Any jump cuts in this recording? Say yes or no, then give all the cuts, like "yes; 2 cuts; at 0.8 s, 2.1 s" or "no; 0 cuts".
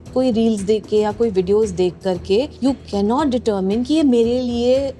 no; 0 cuts